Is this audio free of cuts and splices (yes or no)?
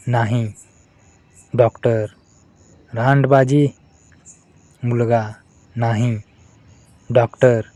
yes